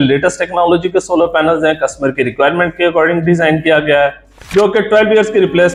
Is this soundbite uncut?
yes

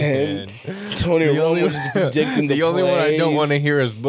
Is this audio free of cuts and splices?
yes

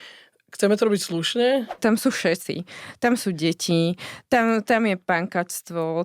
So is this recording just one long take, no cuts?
no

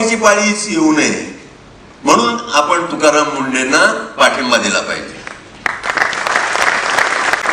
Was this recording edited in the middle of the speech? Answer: no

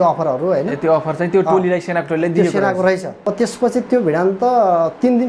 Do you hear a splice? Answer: yes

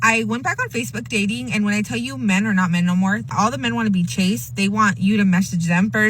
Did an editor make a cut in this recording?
yes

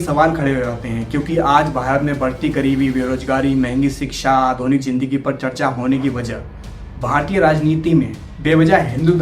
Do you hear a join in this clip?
no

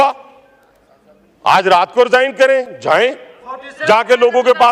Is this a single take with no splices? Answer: yes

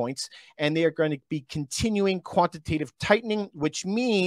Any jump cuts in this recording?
no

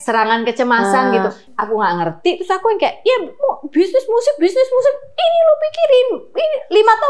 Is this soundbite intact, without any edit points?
no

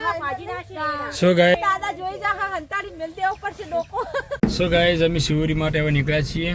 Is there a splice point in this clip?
yes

